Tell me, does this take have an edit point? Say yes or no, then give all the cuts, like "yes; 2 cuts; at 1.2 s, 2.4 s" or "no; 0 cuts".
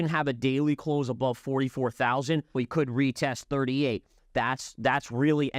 yes; 2 cuts; at 2.6 s, 4.2 s